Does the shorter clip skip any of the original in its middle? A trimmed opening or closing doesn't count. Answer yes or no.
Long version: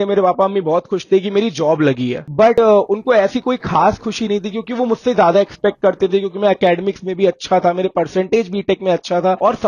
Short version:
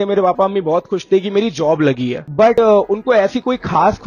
no